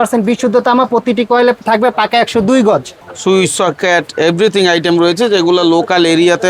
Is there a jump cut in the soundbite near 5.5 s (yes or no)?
no